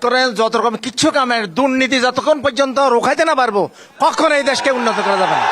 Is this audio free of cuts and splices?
yes; 0 cuts

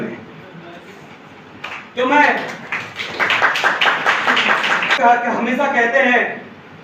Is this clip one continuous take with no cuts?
no; 1 cut; at 5.0 s

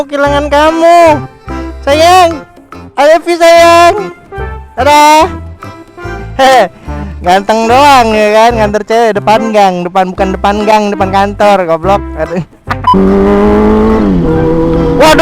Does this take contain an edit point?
no; 0 cuts

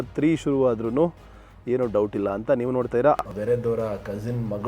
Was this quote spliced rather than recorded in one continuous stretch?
yes; 1 cut; at 3.2 s

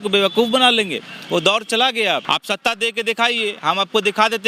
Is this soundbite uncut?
no; 1 cut; at 2.2 s

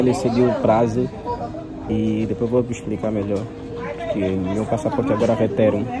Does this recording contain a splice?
no; 0 cuts

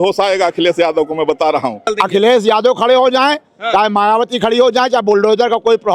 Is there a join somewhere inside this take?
yes; 1 cut; at 1.8 s

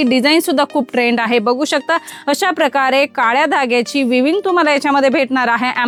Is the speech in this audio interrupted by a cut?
no; 0 cuts

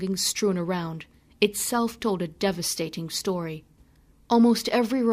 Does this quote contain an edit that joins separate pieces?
yes; 1 cut; at 1.3 s

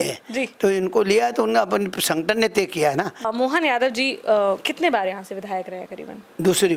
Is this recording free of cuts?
no; 1 cut; at 3.2 s

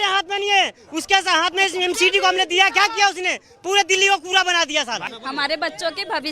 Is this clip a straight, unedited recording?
no; 1 cut; at 5.1 s

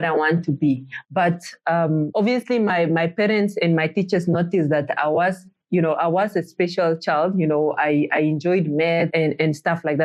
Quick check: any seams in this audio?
no; 0 cuts

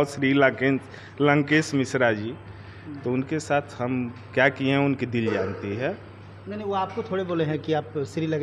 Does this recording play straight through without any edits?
yes; 0 cuts

